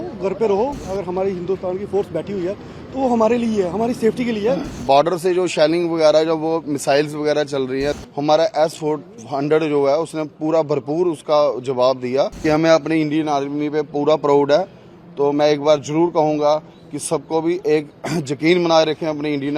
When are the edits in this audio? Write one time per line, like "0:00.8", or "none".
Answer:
0:00.8
0:04.8
0:08.0
0:12.4